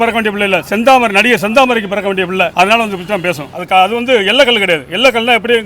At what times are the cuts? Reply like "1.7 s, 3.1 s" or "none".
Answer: 3.4 s

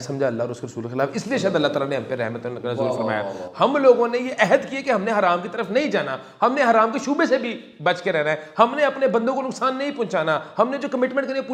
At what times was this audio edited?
none

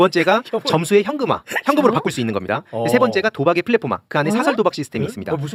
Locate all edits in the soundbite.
none

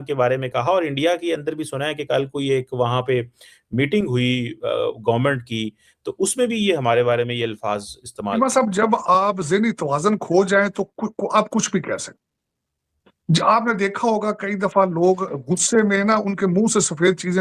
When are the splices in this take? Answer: 8.4 s

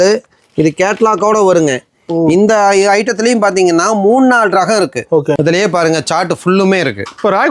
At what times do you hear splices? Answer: 5.4 s

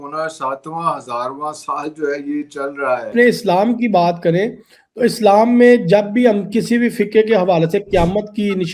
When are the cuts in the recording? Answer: 3.1 s

